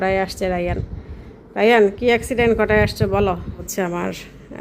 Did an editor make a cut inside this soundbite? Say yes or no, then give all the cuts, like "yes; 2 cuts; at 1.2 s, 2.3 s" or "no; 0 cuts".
yes; 1 cut; at 3.7 s